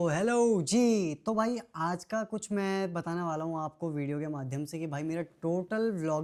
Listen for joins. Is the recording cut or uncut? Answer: uncut